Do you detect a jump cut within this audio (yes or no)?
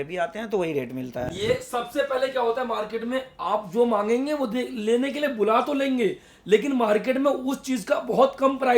no